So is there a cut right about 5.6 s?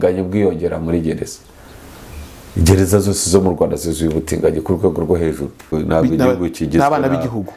yes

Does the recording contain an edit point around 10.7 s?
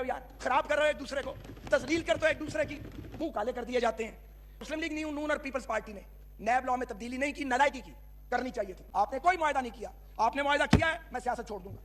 no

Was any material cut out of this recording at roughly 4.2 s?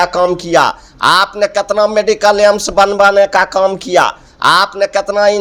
no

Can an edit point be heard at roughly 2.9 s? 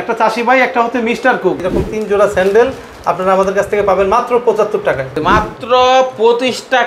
no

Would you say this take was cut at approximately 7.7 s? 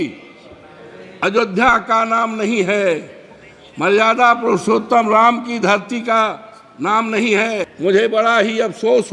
yes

